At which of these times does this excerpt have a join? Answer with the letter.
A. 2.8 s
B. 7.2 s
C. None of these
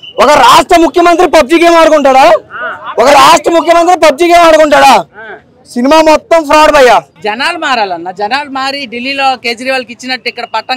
B